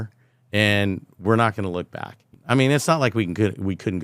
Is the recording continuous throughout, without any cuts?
no; 1 cut; at 2.3 s

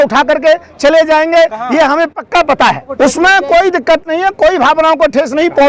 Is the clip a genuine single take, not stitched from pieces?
no; 1 cut; at 2.9 s

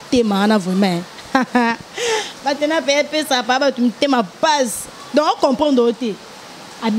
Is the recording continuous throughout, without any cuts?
yes; 0 cuts

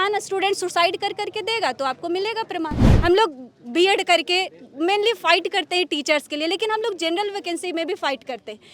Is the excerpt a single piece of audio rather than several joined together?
no; 1 cut; at 2.8 s

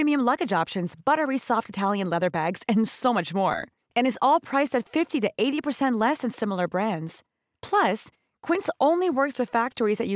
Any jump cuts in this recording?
no; 0 cuts

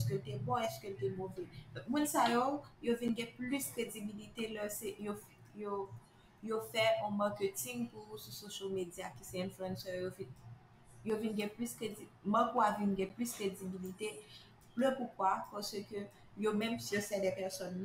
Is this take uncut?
yes; 0 cuts

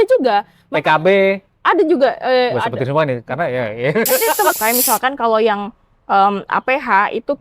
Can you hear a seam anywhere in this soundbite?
yes; 1 cut; at 4.5 s

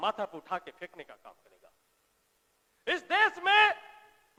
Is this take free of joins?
yes; 0 cuts

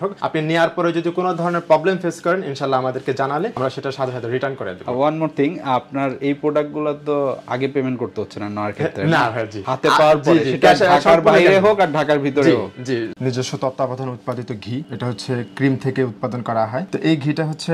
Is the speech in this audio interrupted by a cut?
yes; 1 cut; at 13.1 s

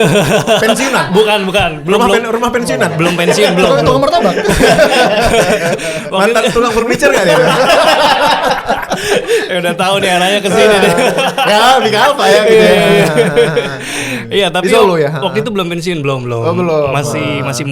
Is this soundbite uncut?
yes; 0 cuts

